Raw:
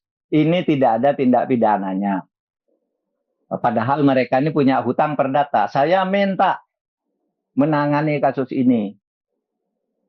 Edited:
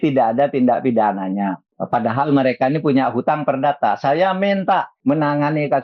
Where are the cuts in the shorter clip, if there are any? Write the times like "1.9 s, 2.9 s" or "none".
1.7 s, 4.9 s